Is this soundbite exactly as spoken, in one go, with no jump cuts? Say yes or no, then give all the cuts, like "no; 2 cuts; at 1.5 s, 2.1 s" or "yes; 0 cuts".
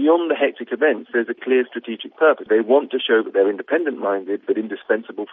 no; 1 cut; at 2.4 s